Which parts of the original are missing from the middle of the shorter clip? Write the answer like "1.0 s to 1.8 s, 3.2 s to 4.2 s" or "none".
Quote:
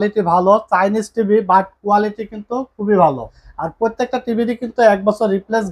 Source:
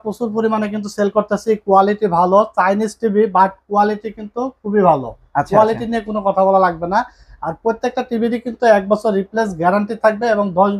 5.2 s to 7.2 s